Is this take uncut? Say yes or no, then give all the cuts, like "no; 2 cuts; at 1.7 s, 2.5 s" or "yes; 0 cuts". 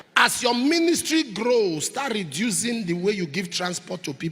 yes; 0 cuts